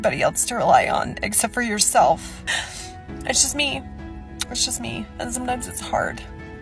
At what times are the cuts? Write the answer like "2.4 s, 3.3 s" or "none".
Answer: 2.5 s